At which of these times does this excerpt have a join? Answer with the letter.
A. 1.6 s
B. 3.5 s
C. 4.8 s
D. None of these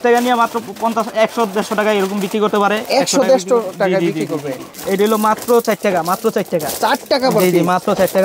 C